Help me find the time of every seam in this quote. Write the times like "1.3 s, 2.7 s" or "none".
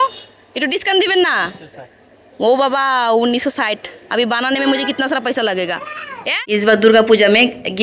6.4 s

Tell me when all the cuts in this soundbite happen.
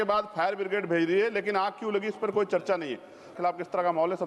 3.3 s

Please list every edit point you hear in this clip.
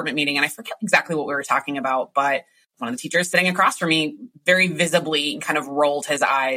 2.6 s

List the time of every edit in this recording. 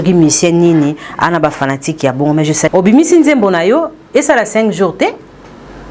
2.7 s

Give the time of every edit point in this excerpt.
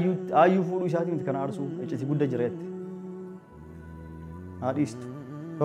2.5 s, 4.0 s

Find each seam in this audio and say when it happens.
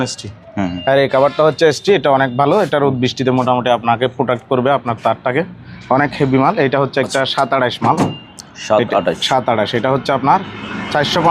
none

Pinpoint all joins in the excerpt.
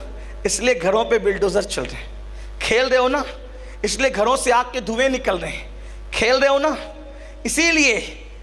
none

